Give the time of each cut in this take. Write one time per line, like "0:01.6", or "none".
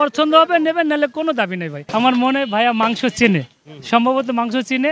0:01.7